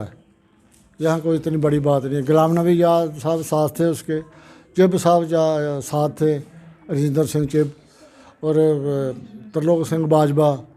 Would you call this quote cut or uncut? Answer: uncut